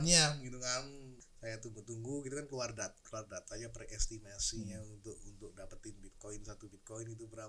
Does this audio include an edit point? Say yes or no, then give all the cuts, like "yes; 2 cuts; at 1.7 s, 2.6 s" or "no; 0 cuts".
yes; 1 cut; at 1.2 s